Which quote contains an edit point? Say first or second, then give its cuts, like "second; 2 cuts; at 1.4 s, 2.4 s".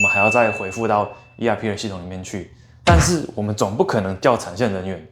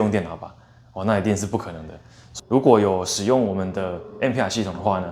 second; 1 cut; at 2.2 s